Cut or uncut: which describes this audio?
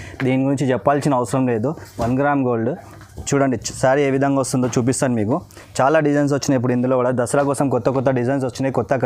uncut